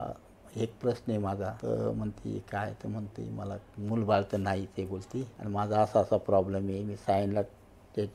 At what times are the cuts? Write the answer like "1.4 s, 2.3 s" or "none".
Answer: 1.6 s, 5.4 s